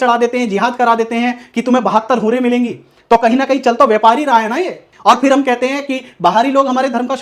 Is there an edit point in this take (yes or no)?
yes